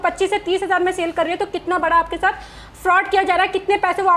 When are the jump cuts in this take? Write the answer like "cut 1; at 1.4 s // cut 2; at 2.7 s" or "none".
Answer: none